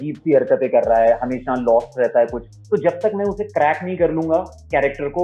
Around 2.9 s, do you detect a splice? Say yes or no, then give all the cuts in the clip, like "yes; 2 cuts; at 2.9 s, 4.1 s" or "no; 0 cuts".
no; 0 cuts